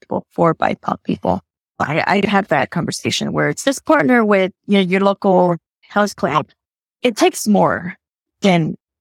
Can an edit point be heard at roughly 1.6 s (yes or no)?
yes